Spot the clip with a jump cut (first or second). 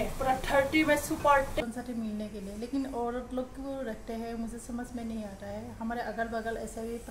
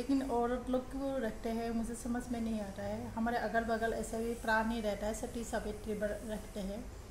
first